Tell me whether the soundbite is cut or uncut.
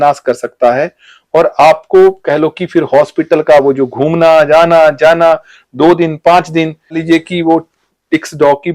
cut